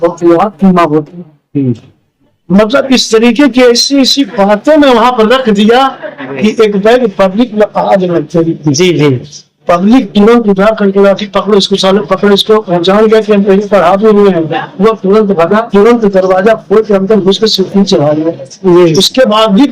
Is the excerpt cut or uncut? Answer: cut